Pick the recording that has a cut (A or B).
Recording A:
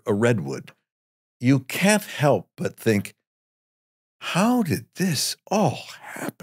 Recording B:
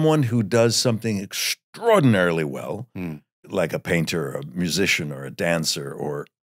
B